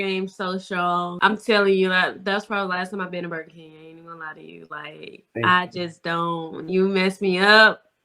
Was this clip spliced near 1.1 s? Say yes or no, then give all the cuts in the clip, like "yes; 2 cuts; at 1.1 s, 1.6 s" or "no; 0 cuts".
yes; 1 cut; at 1.1 s